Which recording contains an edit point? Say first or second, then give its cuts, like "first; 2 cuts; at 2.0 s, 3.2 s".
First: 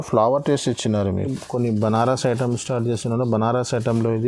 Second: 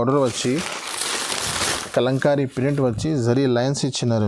first; 1 cut; at 1.4 s